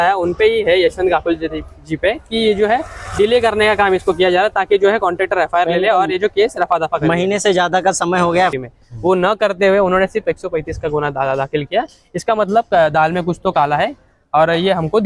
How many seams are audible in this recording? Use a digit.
1